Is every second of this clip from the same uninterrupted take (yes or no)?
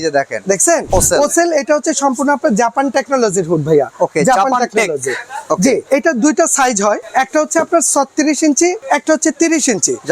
no